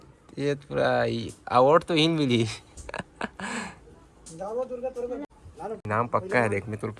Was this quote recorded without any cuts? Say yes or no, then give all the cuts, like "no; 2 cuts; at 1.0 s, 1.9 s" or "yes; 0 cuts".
no; 1 cut; at 5.2 s